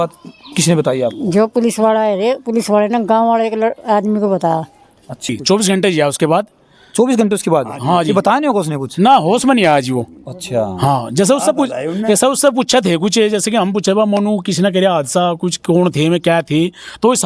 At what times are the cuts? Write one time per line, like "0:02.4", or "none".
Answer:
0:05.3